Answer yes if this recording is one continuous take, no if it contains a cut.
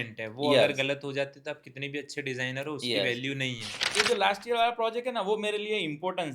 no